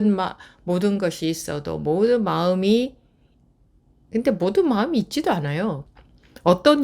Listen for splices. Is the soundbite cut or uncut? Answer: cut